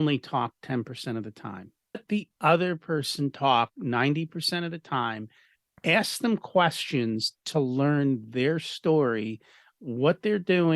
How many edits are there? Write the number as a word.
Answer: one